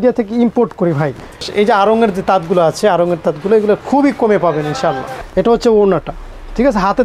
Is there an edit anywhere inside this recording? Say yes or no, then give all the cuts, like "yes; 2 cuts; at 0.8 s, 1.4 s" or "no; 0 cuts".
yes; 2 cuts; at 1.5 s, 5.1 s